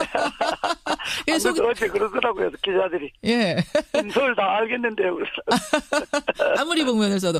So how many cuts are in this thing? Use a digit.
1